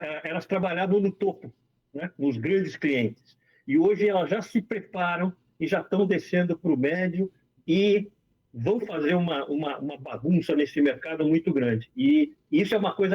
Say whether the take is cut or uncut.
uncut